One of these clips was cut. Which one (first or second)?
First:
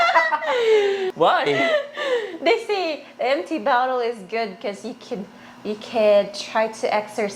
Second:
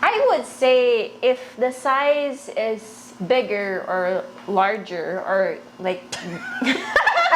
first